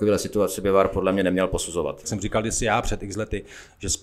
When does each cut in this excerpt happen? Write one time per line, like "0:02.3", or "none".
0:02.1